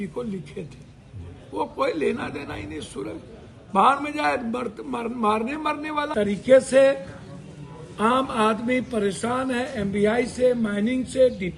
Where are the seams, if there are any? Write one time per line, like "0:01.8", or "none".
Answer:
0:06.1

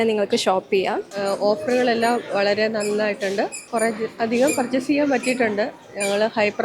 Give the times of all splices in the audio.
0:01.1
0:03.6

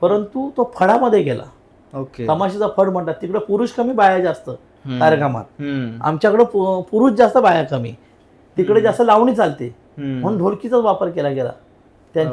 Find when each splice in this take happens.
none

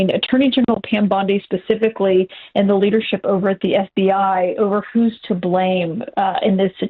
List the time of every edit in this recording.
none

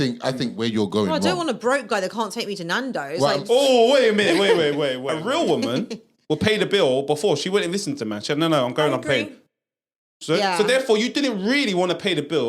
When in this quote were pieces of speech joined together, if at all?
0:05.0

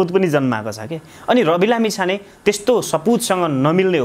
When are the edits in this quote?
none

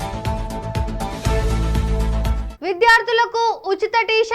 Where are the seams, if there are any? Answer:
0:02.4

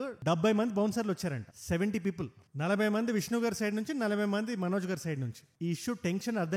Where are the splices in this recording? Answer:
none

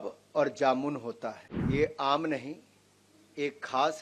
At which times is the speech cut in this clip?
0:01.5

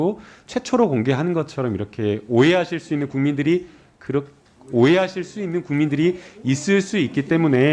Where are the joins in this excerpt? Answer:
none

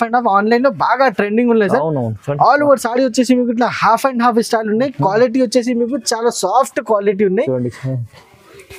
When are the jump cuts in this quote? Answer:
none

